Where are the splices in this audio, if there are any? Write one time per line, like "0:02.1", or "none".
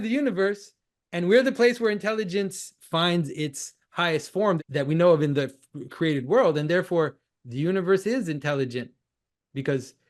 0:02.7
0:04.6